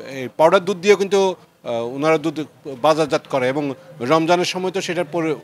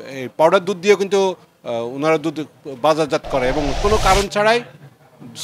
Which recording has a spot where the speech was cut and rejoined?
second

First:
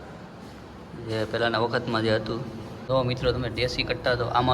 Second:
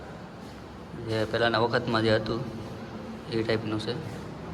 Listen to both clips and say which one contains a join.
first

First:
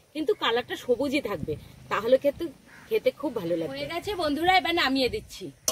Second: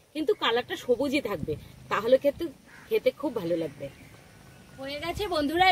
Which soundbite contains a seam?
first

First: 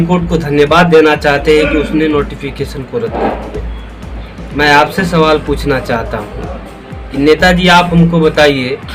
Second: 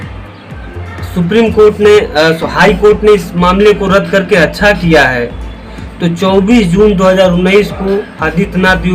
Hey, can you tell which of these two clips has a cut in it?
first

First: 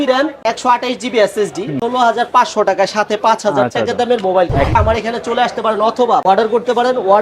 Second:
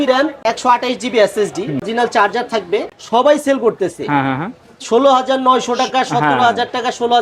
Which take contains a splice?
first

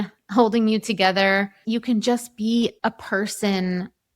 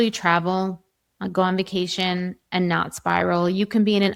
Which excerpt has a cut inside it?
first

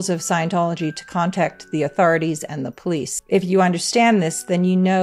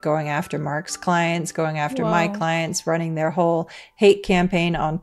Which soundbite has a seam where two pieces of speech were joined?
first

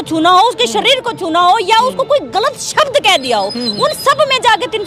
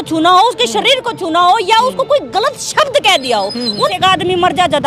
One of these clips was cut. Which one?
second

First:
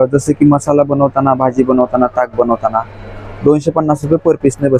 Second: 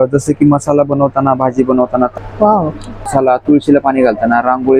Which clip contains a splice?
second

